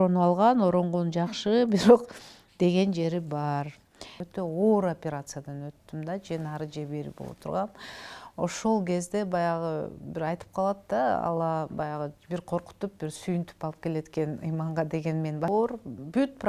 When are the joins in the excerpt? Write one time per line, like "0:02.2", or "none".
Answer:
0:04.2
0:15.5

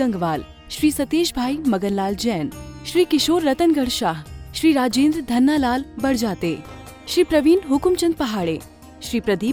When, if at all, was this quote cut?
none

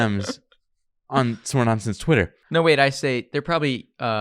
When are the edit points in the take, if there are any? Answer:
0:02.4

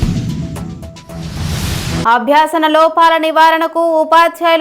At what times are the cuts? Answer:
0:02.0

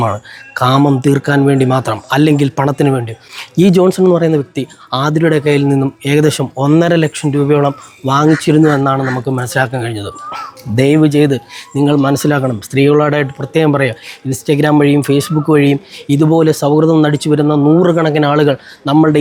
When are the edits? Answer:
none

